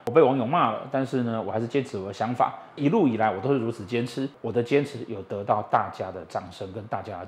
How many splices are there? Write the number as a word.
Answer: two